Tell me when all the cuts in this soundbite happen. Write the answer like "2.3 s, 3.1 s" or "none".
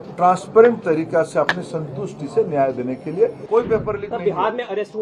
3.4 s